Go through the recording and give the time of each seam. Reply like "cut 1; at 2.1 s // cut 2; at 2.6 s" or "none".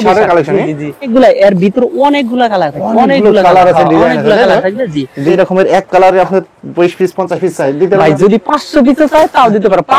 cut 1; at 1.1 s // cut 2; at 5.3 s